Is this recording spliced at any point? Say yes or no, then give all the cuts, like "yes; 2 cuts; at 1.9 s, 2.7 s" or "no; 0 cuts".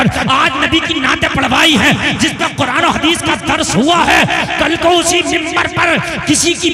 no; 0 cuts